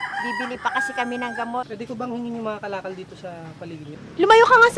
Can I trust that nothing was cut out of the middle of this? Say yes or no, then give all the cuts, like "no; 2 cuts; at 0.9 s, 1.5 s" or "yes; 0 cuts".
no; 2 cuts; at 1.7 s, 4.0 s